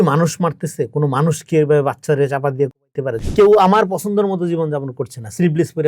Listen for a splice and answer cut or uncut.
cut